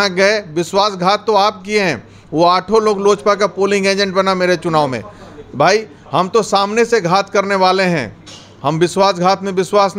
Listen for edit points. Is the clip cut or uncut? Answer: uncut